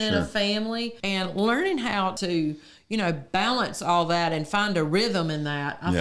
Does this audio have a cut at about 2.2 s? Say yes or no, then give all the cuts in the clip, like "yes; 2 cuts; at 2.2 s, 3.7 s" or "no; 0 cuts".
yes; 2 cuts; at 1.0 s, 2.2 s